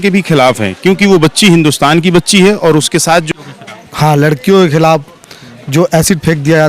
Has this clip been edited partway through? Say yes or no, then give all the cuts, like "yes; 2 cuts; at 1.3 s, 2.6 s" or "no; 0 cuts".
yes; 1 cut; at 3.4 s